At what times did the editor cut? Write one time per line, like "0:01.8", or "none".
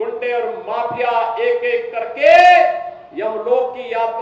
none